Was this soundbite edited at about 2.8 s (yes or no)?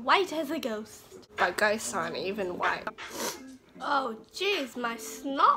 yes